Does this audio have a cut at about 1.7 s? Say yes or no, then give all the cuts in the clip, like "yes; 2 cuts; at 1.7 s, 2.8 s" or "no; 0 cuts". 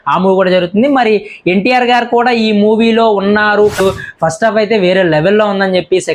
no; 1 cut; at 3.8 s